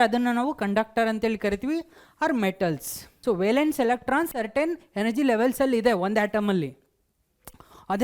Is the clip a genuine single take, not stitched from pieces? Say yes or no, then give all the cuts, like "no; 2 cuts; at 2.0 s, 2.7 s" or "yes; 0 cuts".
no; 1 cut; at 3.1 s